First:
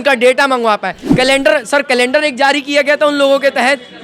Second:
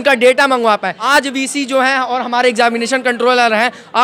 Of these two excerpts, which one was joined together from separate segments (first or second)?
first